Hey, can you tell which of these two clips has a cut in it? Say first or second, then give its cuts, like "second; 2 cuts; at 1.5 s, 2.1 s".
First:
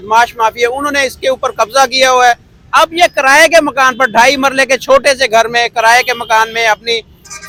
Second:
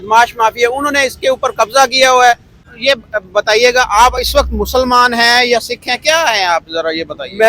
second; 1 cut; at 2.5 s